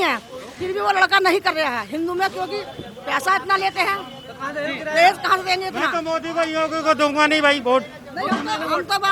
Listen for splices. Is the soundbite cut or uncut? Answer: uncut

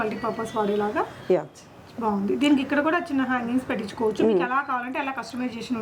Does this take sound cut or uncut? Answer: uncut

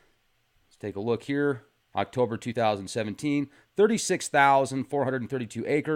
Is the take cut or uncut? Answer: uncut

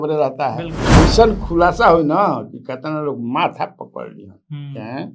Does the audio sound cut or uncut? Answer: cut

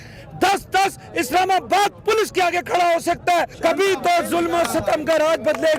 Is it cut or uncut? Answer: cut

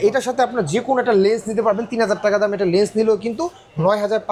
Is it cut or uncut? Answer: uncut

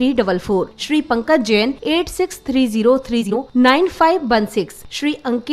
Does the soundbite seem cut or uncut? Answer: cut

